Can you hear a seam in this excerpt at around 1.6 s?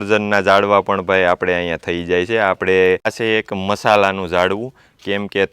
no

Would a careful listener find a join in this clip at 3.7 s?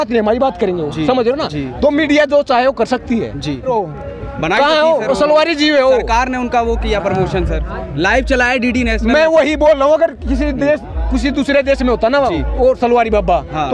yes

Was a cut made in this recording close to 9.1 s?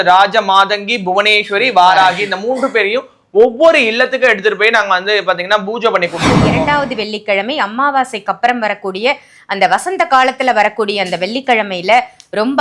no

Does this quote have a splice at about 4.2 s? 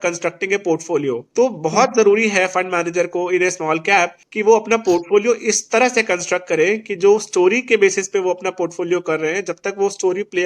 yes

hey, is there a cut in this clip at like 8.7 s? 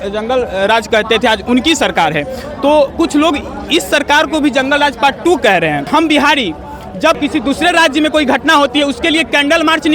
no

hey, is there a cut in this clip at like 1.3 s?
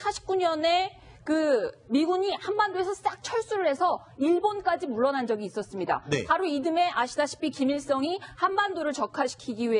no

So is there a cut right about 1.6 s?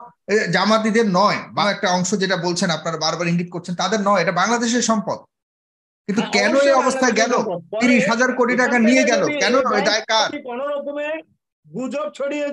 yes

